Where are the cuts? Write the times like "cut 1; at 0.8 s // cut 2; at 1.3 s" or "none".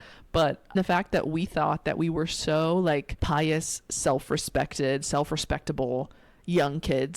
cut 1; at 0.7 s // cut 2; at 3.1 s

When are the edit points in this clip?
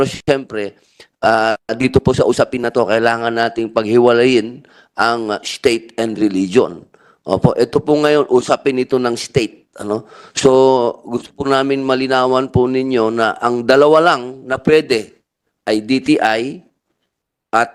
none

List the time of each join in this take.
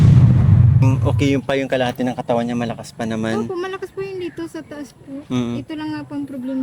cut 1; at 0.9 s

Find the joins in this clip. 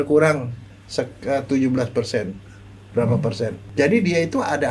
cut 1; at 3.6 s

